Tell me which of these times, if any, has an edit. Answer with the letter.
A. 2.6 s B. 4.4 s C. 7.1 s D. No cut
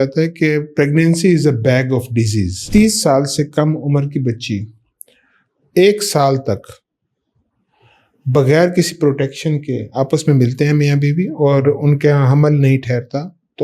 A